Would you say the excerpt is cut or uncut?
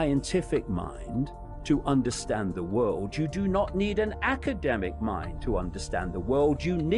uncut